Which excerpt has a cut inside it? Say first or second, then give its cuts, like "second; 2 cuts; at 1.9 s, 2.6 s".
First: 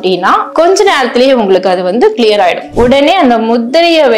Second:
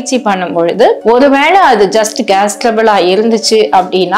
first; 1 cut; at 2.7 s